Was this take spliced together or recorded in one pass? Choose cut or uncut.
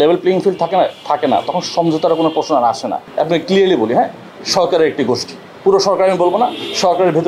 cut